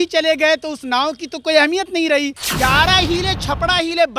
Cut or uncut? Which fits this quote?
cut